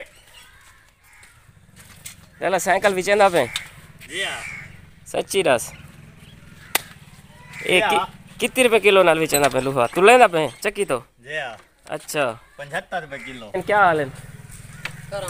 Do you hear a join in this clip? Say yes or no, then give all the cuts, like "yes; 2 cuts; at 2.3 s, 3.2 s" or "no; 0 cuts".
yes; 1 cut; at 13.6 s